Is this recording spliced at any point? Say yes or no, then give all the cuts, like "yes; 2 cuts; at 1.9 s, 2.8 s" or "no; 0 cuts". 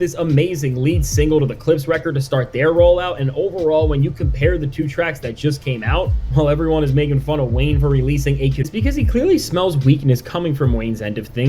yes; 1 cut; at 8.7 s